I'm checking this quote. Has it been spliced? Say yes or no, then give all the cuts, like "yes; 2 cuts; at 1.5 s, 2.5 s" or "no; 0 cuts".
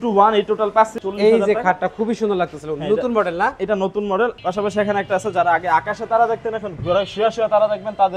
yes; 2 cuts; at 0.9 s, 4.4 s